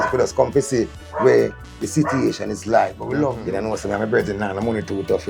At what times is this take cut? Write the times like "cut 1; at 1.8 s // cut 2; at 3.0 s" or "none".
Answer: cut 1; at 3.3 s